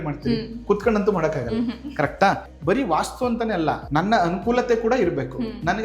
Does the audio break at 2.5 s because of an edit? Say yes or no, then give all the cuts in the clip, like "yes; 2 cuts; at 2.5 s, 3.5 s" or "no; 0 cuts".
yes; 2 cuts; at 2.5 s, 3.8 s